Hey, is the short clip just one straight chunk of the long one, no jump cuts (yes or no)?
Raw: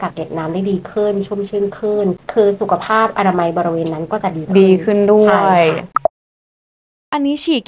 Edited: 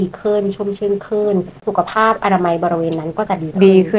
no